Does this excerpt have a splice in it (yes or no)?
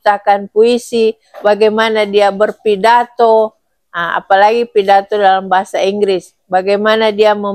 no